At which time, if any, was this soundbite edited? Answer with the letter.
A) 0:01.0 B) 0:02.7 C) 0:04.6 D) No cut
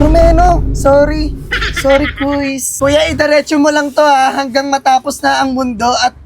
B